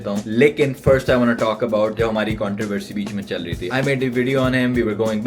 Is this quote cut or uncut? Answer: cut